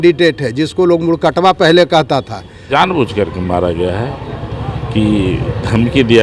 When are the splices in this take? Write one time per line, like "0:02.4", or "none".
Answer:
0:02.7